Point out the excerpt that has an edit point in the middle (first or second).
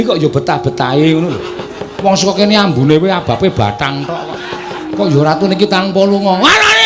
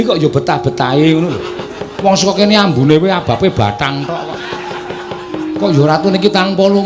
first